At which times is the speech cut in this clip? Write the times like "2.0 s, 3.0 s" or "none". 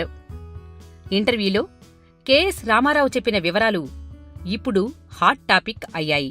5.3 s